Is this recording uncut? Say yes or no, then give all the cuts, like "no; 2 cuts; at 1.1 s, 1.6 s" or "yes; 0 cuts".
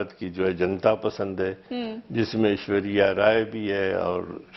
yes; 0 cuts